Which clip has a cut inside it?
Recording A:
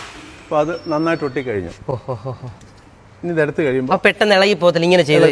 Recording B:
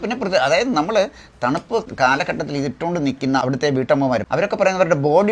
B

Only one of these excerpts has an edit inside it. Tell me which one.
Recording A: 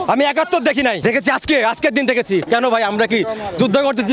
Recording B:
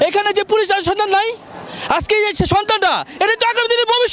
A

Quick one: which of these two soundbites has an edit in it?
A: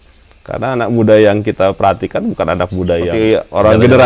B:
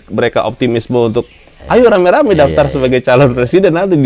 A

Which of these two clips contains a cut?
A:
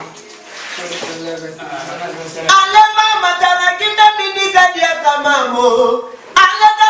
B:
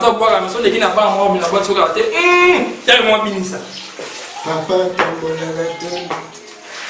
A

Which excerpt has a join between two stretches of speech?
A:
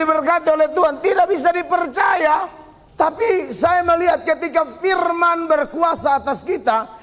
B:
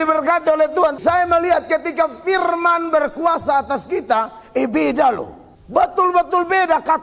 B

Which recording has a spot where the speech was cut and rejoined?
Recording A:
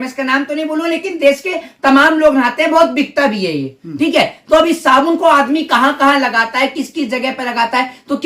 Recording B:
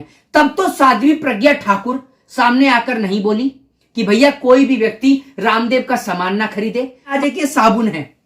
B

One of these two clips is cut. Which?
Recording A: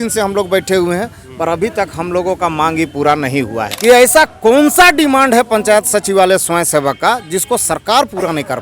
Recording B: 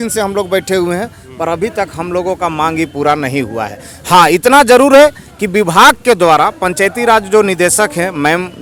A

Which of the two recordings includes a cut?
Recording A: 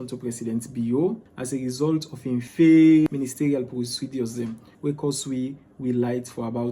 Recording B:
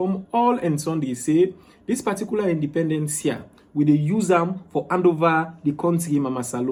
A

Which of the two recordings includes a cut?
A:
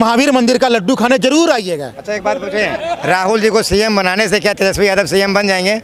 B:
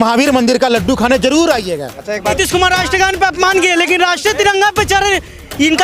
B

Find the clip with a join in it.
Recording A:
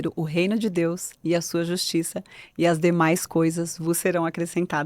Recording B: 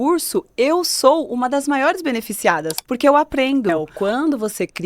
B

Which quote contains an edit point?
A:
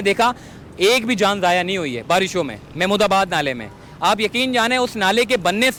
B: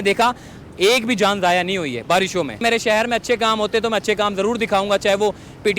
B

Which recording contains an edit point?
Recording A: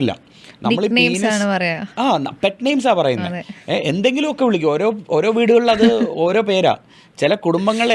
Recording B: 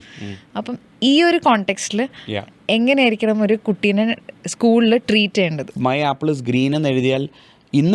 B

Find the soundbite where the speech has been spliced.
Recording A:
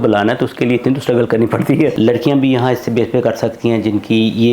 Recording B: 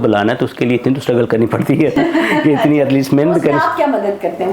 A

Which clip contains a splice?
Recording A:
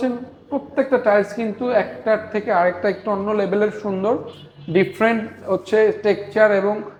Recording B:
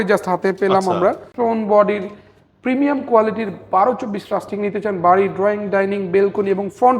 B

